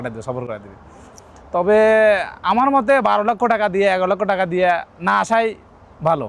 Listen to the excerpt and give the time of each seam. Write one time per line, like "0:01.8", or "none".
none